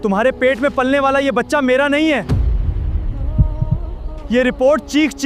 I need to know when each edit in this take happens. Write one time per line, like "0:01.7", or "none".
none